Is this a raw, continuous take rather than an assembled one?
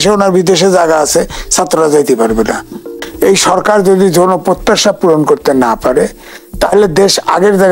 no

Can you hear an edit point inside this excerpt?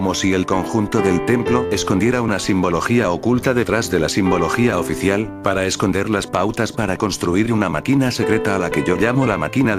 yes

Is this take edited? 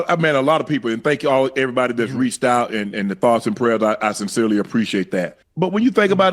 yes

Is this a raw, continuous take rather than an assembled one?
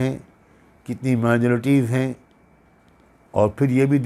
yes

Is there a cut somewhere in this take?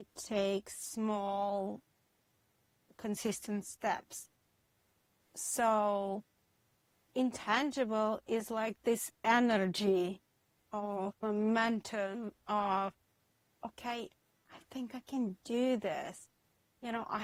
no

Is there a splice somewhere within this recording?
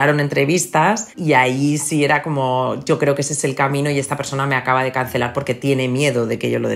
yes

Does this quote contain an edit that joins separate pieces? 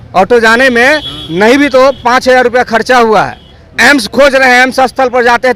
no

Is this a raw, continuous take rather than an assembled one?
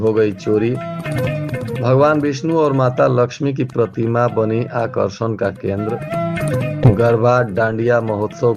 yes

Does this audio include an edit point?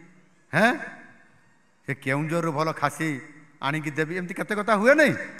no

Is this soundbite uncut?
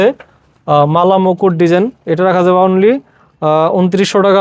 yes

